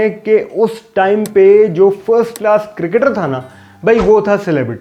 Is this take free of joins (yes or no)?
yes